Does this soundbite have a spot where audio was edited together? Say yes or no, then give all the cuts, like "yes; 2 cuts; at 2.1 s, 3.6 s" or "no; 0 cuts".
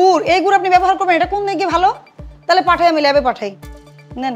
no; 0 cuts